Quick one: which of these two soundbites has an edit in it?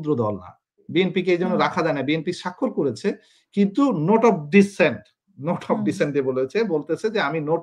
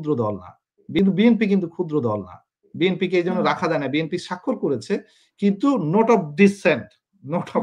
first; 1 cut; at 1.0 s

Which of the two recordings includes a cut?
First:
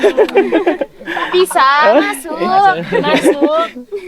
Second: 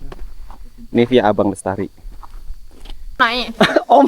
second; 1 cut; at 3.2 s

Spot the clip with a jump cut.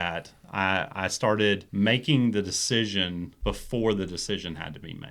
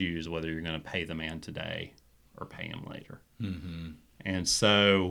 first; 2 cuts; at 1.7 s, 3.3 s

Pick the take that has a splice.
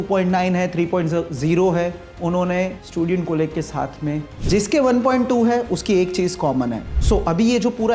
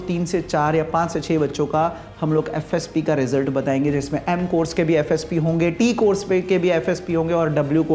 first; 3 cuts; at 2.8 s, 4.3 s, 6.8 s

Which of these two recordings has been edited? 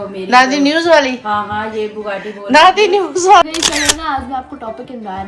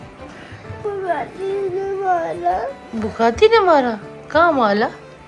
first; 1 cut; at 3.4 s

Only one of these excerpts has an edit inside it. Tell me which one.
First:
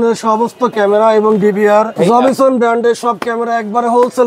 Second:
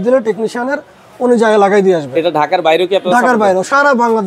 first; 1 cut; at 1.9 s

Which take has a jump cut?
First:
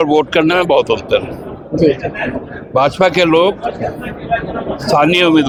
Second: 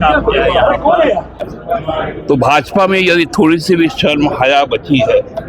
second; 1 cut; at 1.5 s

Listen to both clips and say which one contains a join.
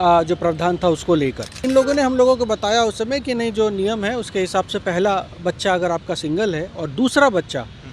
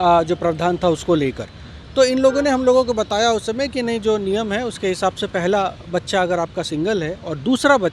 first; 1 cut; at 1.6 s

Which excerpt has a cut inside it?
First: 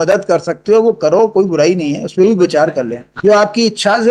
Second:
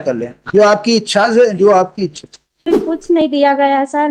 second; 1 cut; at 2.8 s

